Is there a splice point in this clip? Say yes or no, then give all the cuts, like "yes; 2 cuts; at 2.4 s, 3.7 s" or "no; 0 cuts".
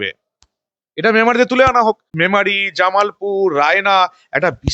yes; 1 cut; at 2.1 s